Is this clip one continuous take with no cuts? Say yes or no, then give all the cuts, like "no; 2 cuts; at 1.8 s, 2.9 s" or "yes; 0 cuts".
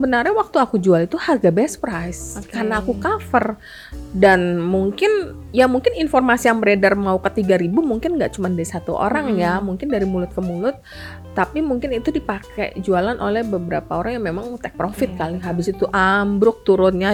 yes; 0 cuts